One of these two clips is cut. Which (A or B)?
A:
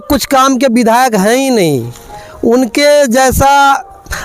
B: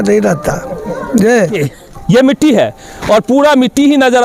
B